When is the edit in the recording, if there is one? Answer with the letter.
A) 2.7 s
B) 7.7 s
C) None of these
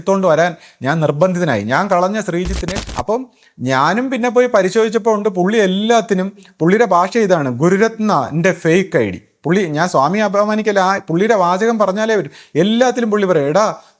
A